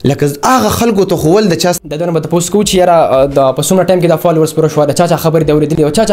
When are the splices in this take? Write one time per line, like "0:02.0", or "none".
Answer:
0:01.9